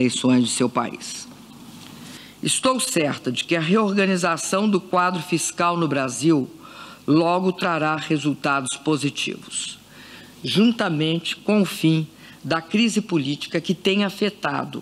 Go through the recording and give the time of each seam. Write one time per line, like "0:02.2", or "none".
0:09.9

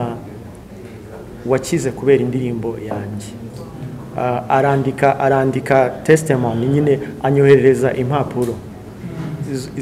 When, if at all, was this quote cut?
none

